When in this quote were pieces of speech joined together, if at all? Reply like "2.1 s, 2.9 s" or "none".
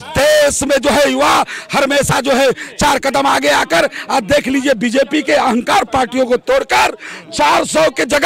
none